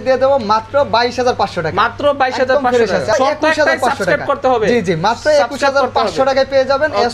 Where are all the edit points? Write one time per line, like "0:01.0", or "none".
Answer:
0:03.1